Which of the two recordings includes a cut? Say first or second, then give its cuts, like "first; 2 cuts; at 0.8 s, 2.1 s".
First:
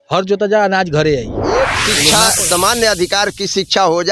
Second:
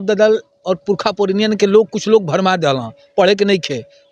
first; 1 cut; at 1.7 s